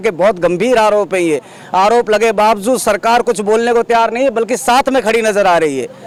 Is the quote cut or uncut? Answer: uncut